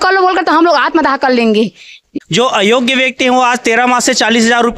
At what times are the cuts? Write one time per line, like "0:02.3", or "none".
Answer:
0:02.1